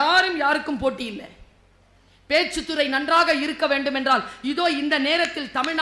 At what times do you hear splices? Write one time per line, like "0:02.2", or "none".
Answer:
none